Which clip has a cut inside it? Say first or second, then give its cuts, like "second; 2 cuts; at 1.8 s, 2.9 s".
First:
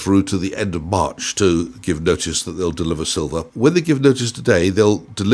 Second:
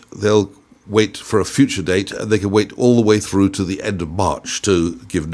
first; 1 cut; at 3.5 s